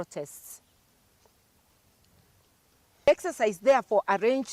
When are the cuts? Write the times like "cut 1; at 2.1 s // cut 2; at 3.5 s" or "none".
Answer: cut 1; at 3.1 s